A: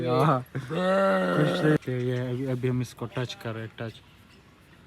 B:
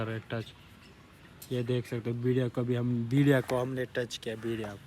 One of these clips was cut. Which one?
A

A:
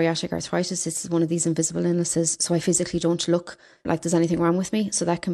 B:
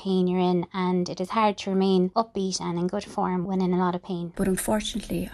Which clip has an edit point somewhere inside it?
B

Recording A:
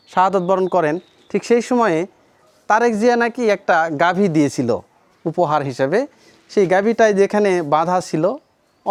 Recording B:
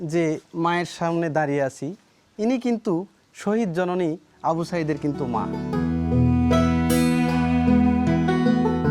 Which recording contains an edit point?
B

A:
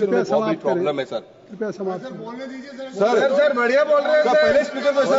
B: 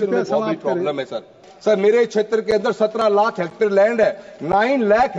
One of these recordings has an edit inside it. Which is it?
B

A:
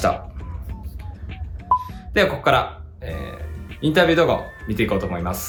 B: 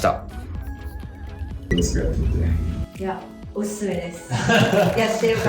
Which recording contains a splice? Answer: B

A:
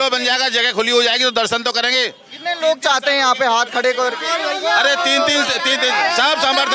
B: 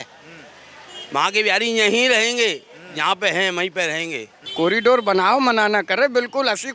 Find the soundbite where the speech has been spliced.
B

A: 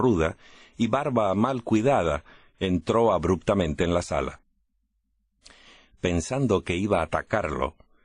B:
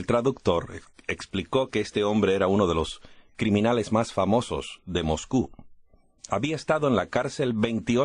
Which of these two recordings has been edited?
B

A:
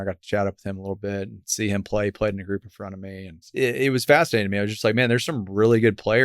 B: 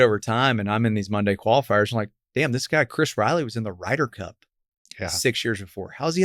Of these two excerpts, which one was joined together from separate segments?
A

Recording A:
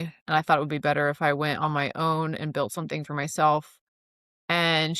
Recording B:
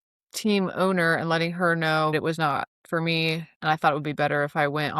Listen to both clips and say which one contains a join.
B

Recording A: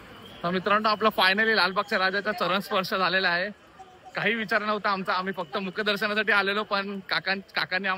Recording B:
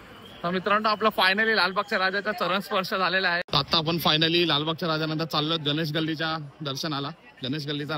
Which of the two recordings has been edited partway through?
B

